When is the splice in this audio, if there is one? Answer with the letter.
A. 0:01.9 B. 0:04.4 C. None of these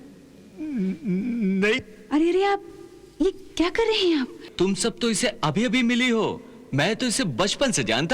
B